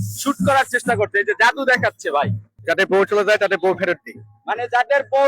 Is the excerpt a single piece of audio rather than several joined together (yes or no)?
no